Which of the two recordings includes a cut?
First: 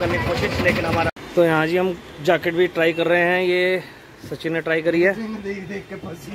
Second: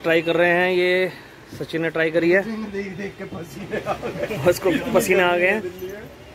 first; 1 cut; at 1.1 s

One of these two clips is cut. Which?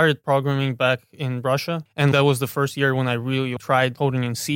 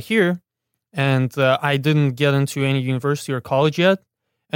first; 1 cut; at 1.9 s

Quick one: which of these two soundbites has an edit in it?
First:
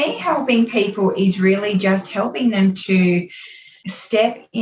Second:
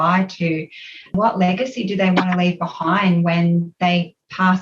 second; 1 cut; at 1.1 s

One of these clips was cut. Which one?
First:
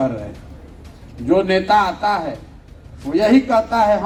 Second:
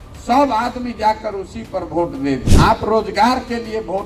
second; 1 cut; at 2.5 s

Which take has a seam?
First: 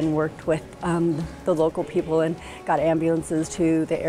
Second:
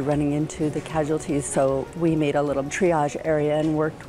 second; 1 cut; at 2.7 s

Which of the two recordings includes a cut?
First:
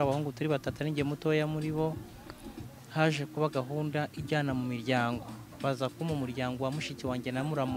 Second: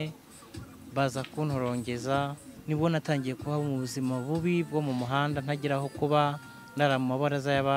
second; 1 cut; at 2.5 s

